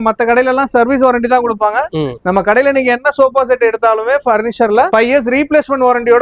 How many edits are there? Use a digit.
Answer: 1